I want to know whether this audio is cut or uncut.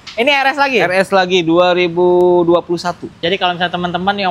cut